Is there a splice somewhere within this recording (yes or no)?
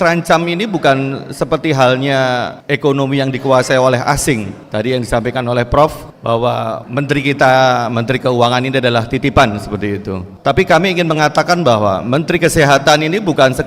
yes